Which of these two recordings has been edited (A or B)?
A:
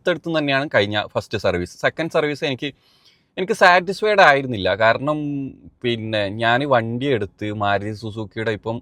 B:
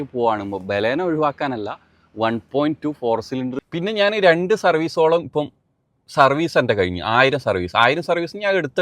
B